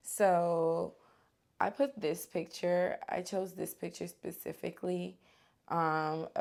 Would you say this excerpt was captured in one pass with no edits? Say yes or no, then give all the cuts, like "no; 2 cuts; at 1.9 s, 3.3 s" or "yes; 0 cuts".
yes; 0 cuts